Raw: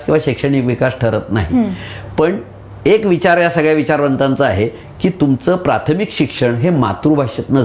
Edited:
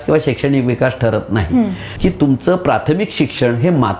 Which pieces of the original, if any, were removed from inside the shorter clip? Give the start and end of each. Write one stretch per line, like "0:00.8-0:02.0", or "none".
0:01.9-0:04.9